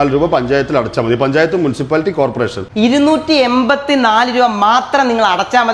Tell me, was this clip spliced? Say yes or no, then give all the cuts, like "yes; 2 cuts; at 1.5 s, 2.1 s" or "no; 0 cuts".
no; 0 cuts